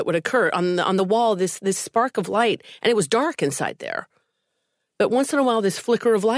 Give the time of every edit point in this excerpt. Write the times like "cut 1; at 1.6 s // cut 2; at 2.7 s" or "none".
cut 1; at 1.0 s